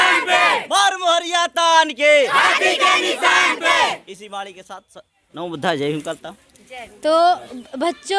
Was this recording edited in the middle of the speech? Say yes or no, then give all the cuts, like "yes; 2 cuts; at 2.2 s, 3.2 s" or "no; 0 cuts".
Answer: no; 0 cuts